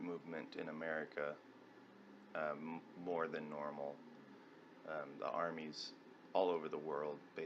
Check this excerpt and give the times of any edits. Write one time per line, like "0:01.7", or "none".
0:01.5